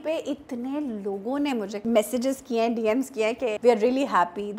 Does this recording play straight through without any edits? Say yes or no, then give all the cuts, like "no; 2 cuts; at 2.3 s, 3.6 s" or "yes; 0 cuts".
no; 2 cuts; at 1.7 s, 3.6 s